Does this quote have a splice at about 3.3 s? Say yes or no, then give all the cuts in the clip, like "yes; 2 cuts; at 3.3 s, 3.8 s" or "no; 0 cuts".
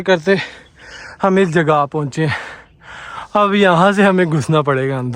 no; 0 cuts